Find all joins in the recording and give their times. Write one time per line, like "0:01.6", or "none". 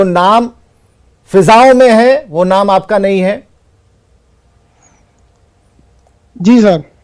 none